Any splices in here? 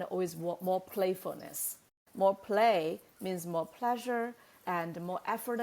yes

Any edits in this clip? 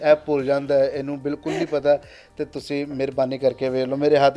no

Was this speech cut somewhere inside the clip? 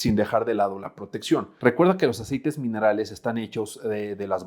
yes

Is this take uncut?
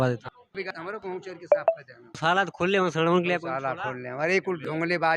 yes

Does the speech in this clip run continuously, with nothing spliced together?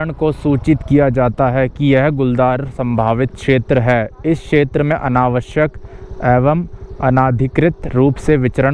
yes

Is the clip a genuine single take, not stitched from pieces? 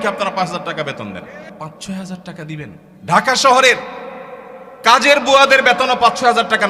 no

